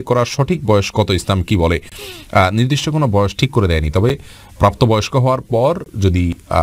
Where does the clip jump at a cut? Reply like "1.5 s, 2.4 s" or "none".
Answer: none

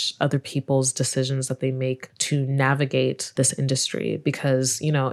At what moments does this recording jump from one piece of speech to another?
2.1 s, 3.3 s

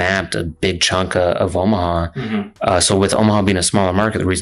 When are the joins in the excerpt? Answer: none

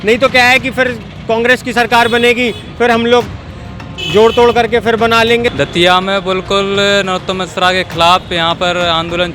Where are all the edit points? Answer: 5.5 s

